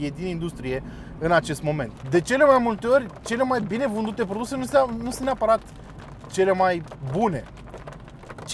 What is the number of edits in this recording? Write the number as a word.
one